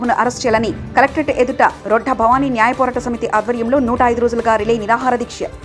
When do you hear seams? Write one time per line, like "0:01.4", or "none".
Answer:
none